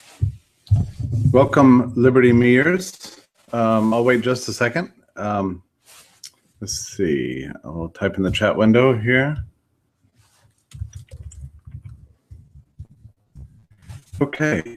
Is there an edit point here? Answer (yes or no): no